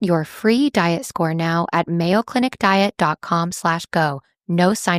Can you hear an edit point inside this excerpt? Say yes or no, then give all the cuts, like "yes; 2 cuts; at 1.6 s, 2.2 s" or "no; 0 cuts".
no; 0 cuts